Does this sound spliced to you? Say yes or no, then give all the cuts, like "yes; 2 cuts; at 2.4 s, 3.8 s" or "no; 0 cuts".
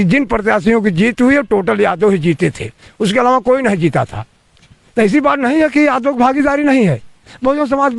no; 0 cuts